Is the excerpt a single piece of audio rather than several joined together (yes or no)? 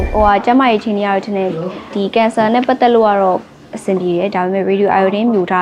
no